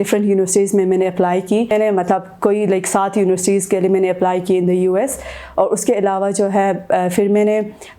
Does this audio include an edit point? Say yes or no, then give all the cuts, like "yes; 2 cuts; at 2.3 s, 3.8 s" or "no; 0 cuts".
yes; 1 cut; at 1.7 s